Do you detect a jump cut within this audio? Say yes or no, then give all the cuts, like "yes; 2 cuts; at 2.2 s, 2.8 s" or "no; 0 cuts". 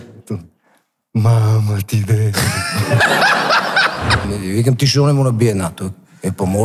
yes; 1 cut; at 4.3 s